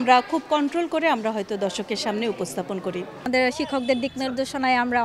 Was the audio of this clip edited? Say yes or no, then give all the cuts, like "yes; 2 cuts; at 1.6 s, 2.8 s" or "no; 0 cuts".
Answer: yes; 1 cut; at 3.1 s